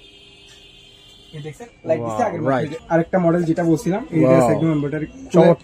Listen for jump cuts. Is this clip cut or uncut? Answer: cut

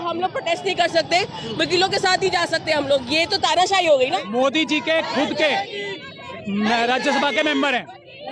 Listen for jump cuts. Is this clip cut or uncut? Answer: cut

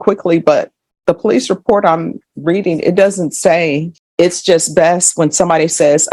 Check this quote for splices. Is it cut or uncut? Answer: cut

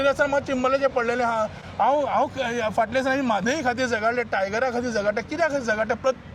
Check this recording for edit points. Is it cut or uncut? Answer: uncut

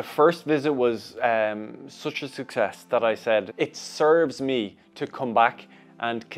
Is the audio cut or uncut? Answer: cut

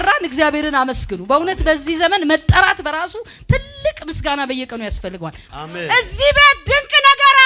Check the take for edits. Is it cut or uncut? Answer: cut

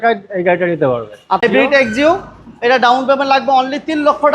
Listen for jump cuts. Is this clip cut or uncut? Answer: cut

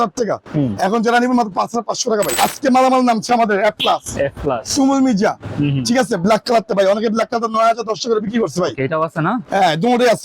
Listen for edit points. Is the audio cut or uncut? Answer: cut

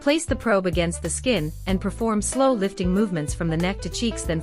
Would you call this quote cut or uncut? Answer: cut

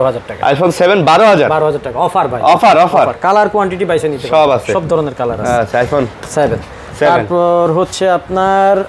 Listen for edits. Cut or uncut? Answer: uncut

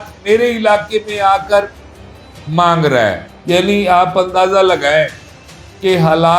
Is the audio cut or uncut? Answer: cut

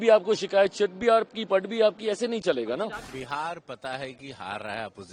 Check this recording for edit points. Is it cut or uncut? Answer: cut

